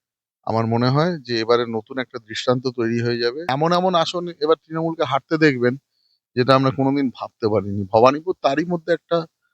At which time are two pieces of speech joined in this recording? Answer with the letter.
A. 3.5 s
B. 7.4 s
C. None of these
A